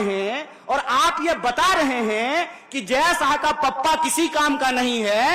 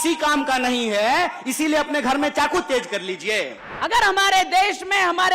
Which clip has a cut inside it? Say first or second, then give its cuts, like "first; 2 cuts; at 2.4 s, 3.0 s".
second; 1 cut; at 3.6 s